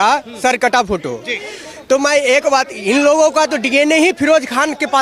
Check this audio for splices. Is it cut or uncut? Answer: uncut